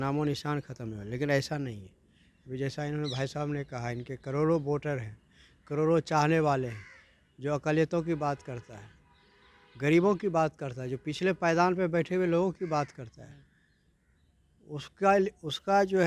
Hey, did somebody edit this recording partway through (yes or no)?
no